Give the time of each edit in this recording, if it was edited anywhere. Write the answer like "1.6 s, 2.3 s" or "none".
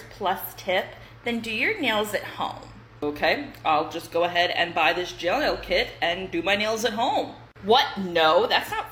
none